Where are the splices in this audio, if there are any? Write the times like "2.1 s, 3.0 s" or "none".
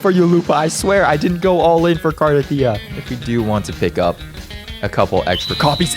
2.8 s